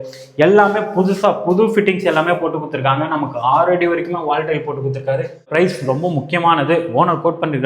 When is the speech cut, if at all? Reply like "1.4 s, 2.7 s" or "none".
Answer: 5.5 s

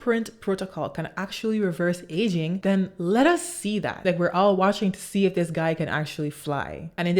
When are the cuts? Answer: 3.9 s

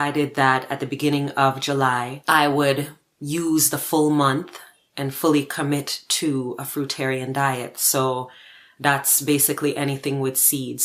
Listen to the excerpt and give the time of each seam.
2.1 s

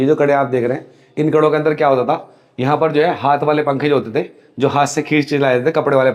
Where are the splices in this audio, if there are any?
none

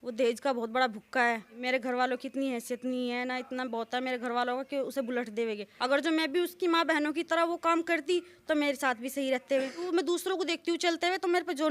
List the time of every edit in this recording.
1.6 s, 5.7 s, 9.9 s

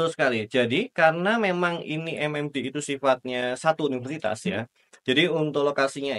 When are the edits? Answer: none

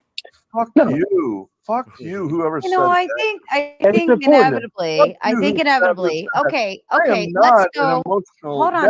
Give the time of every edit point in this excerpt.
none

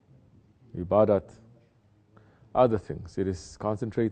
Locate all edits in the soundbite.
1.1 s

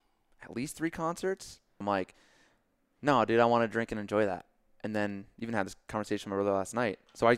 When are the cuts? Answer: 1.8 s

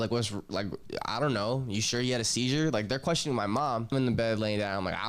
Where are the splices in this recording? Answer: 3.9 s

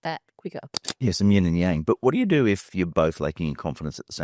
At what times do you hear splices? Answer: none

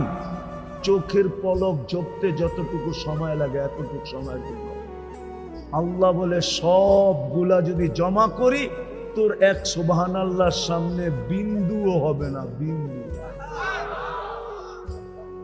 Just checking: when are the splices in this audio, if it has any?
14.5 s

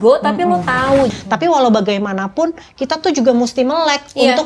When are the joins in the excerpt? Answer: 1.1 s

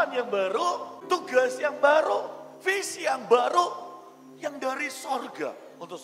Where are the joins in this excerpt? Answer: 0.9 s

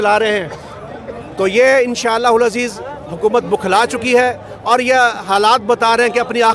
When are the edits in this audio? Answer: none

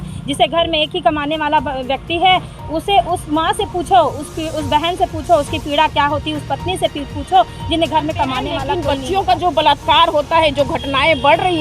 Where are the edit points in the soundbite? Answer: 8.7 s

